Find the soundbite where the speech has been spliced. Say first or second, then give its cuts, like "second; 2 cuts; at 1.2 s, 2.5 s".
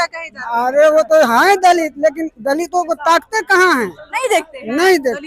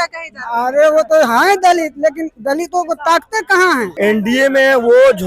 second; 1 cut; at 3.9 s